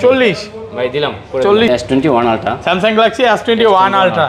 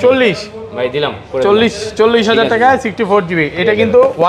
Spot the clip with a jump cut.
first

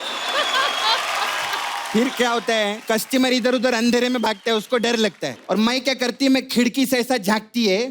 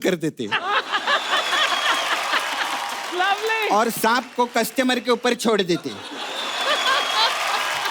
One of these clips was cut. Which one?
first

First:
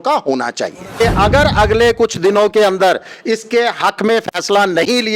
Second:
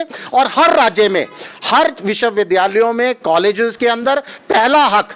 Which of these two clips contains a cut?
first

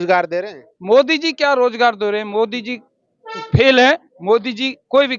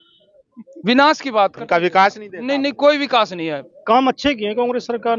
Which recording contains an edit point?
second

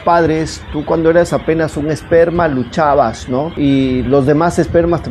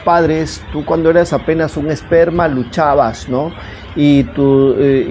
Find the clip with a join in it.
first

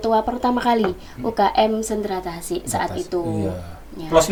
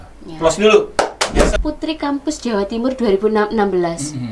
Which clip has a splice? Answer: second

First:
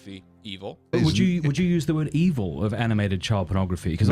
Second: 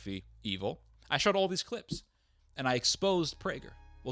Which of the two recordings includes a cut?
first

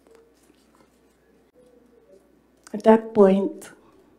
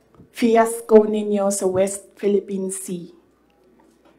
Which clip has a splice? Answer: first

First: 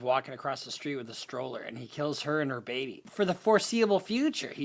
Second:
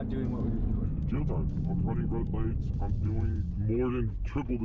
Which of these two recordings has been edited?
first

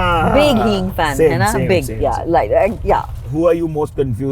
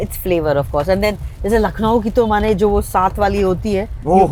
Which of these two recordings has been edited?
first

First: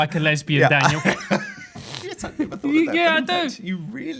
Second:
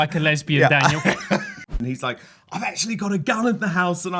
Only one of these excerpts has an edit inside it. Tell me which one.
second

